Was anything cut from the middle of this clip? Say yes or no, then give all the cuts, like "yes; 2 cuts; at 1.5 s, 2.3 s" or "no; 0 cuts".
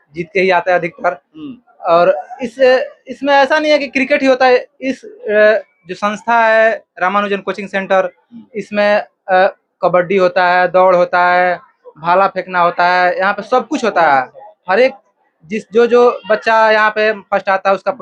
no; 0 cuts